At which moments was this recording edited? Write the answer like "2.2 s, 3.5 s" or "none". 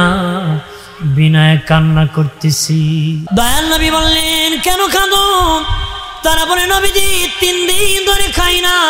3.2 s